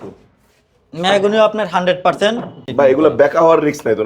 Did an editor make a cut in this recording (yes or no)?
yes